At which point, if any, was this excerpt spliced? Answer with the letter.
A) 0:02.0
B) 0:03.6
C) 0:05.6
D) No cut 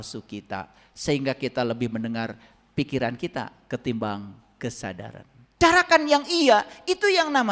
C